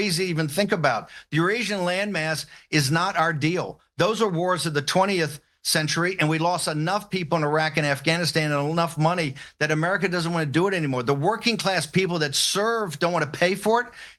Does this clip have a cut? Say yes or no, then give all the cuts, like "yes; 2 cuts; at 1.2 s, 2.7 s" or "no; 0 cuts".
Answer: no; 0 cuts